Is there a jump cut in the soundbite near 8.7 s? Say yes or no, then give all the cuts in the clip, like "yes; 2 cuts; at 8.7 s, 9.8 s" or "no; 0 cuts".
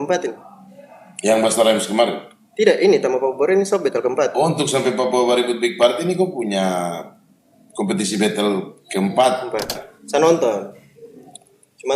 no; 1 cut; at 9.9 s